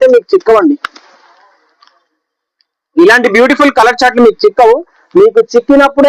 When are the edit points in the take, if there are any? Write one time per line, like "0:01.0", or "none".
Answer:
none